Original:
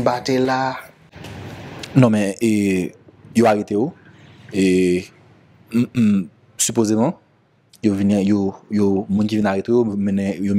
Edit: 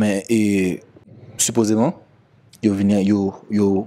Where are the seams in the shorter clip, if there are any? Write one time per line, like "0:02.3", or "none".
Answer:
0:01.1

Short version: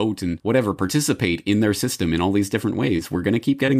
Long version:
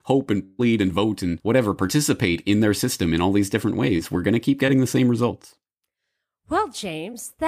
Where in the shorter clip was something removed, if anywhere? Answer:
none

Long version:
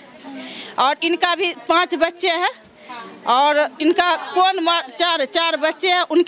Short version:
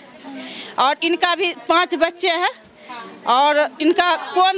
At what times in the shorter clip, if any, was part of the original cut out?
none

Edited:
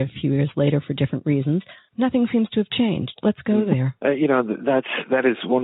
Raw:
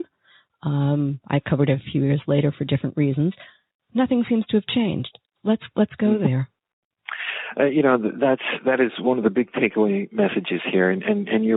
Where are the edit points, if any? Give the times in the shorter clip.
0:01.8
0:03.1
0:03.9

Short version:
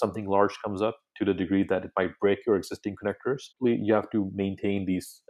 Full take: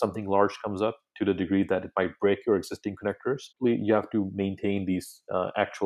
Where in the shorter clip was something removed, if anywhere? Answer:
none

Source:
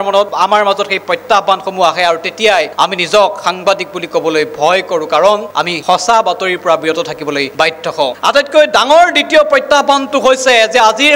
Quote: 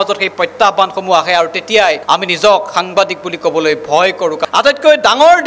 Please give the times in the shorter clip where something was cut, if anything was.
0:04.4

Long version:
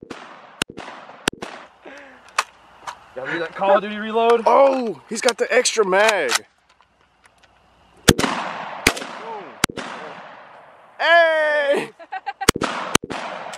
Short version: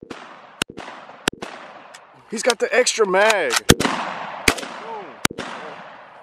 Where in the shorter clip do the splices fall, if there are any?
0:02.2
0:03.6

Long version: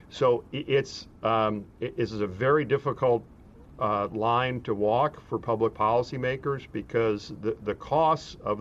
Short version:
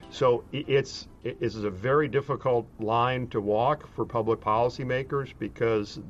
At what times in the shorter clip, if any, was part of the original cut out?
0:01.1
0:02.8

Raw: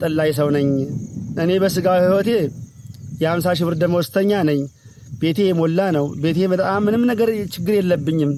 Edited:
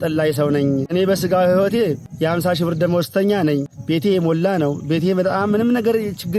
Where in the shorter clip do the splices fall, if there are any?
0:00.9
0:02.1
0:03.7

